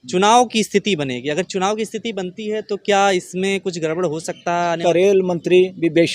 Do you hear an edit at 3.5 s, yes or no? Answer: no